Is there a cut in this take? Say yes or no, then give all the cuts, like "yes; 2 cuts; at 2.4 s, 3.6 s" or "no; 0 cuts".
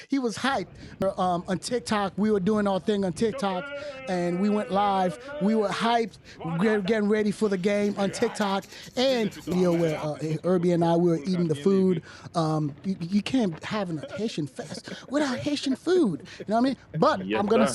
yes; 2 cuts; at 1.0 s, 9.5 s